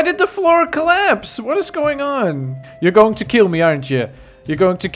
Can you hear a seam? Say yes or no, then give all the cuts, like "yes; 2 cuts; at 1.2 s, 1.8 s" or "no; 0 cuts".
yes; 1 cut; at 2.6 s